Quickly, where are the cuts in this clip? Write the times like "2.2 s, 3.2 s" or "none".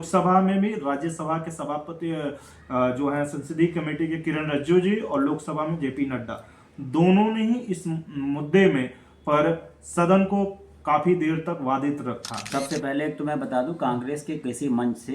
12.5 s